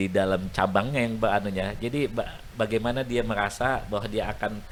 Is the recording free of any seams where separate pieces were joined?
yes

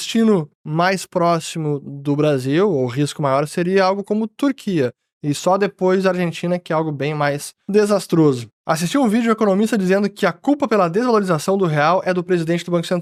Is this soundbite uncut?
yes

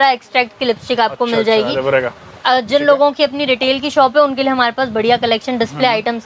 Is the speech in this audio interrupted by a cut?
no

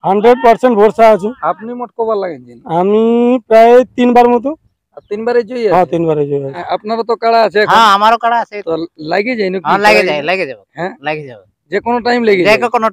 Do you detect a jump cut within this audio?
yes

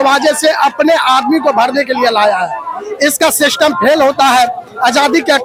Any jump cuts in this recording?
no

